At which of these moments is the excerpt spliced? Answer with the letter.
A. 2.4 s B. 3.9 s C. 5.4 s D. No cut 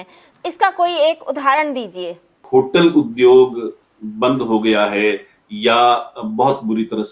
A